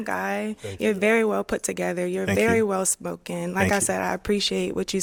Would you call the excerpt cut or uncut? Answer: uncut